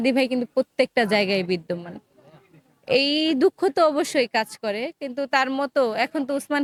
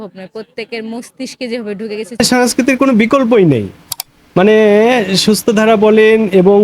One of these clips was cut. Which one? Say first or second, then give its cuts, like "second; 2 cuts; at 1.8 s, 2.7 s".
second; 1 cut; at 2.2 s